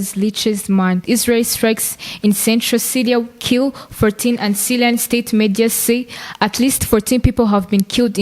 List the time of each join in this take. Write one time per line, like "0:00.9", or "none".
0:01.0